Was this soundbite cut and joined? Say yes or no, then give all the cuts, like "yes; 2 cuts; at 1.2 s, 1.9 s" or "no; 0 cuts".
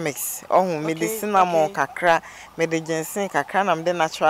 no; 0 cuts